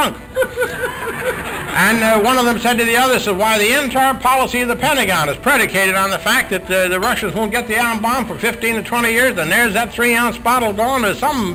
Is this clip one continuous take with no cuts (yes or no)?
yes